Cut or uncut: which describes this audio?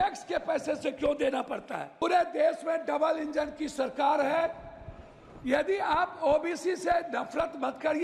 cut